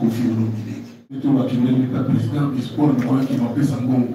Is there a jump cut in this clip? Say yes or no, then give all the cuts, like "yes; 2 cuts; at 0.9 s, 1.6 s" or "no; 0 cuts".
yes; 1 cut; at 1.2 s